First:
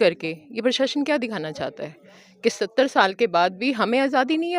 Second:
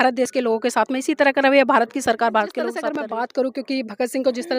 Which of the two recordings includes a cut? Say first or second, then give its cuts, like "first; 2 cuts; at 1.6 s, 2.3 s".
second; 1 cut; at 2.9 s